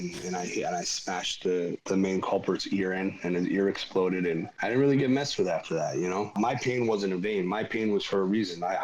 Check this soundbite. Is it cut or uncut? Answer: cut